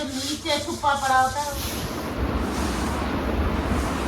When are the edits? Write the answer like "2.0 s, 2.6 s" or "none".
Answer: 1.6 s

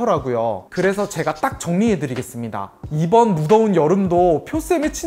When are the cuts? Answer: 2.8 s

